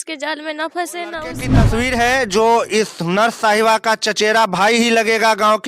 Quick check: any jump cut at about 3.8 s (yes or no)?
no